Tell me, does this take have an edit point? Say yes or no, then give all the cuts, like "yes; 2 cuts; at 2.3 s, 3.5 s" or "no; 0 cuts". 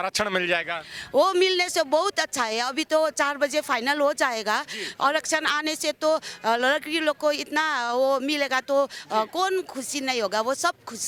no; 0 cuts